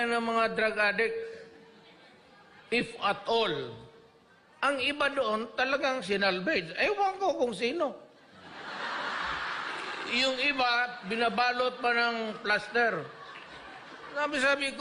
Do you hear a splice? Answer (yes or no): no